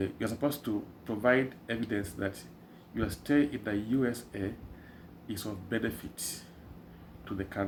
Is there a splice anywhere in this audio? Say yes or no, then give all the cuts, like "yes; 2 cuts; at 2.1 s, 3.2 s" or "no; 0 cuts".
no; 0 cuts